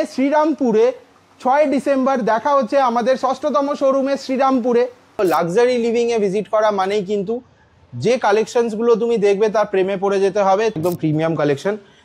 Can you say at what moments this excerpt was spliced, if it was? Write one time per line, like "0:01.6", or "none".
0:05.2
0:10.8